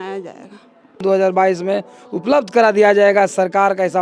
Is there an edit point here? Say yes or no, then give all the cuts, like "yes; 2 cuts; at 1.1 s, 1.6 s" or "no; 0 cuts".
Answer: yes; 1 cut; at 1.0 s